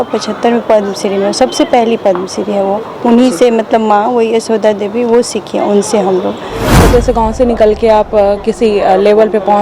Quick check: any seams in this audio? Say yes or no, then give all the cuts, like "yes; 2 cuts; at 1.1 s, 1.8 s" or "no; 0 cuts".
yes; 1 cut; at 6.8 s